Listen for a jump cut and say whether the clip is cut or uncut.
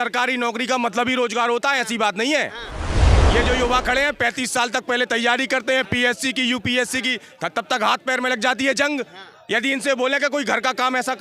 uncut